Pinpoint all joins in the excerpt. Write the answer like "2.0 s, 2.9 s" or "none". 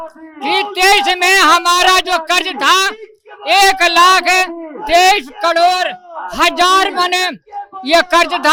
none